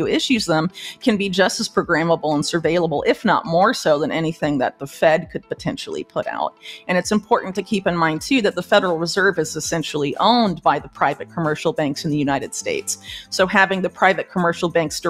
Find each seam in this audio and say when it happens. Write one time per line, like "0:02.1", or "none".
none